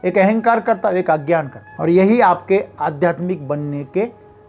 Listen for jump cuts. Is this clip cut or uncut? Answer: cut